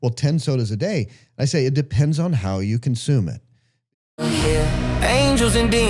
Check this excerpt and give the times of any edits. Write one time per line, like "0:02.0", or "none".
0:03.8